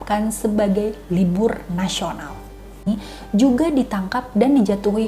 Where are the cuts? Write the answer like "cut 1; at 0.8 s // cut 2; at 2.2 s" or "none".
cut 1; at 2.9 s